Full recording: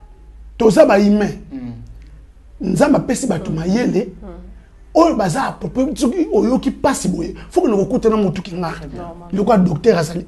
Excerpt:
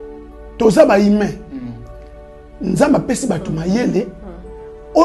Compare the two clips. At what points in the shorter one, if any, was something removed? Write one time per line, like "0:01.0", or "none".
none